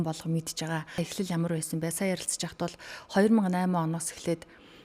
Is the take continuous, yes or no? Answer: no